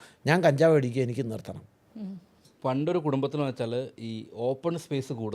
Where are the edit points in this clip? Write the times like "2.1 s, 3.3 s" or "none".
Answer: 2.5 s